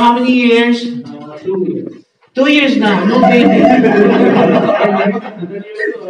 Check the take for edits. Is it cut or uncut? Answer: uncut